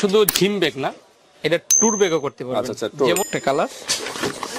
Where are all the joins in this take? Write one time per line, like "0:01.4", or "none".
0:03.3